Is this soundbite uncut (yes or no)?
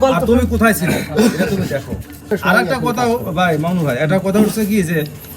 no